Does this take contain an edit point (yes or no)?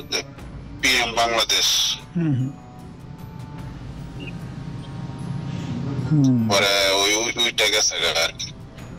no